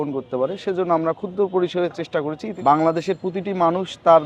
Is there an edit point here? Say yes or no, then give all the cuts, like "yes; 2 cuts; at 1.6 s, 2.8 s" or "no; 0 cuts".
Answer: yes; 1 cut; at 2.5 s